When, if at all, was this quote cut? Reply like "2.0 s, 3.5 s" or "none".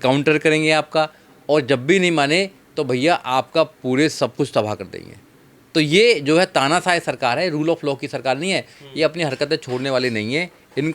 8.7 s